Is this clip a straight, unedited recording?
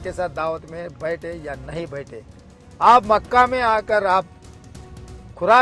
yes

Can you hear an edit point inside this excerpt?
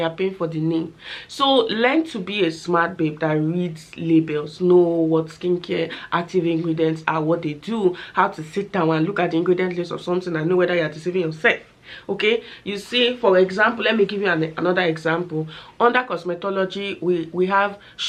no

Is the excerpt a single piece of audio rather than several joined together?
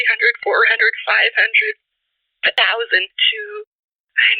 no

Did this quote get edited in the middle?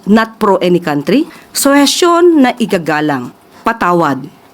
yes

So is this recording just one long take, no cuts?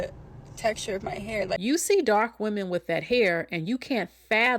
no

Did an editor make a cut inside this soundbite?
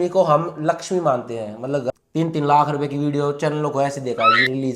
yes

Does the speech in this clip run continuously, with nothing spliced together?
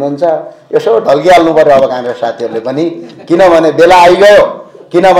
yes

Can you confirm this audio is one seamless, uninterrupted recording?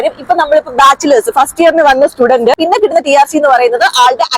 no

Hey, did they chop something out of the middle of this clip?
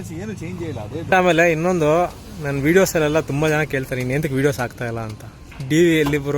yes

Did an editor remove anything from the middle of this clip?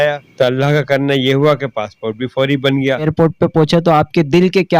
yes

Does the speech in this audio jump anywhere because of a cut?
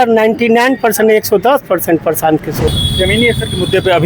yes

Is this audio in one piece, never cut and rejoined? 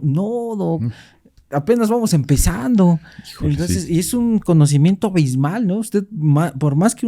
yes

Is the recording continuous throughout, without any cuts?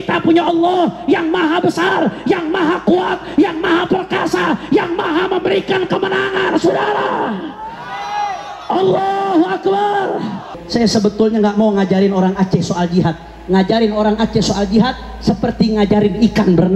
no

